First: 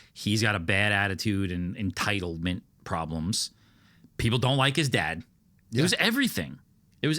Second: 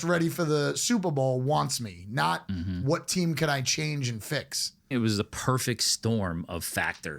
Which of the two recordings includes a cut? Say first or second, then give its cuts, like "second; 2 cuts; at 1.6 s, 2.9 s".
second; 1 cut; at 4.9 s